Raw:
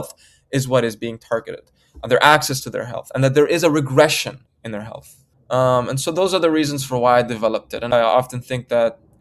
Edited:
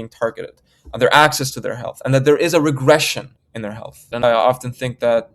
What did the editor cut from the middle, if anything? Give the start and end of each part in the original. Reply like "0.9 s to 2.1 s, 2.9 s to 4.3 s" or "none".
5.1 s to 7.7 s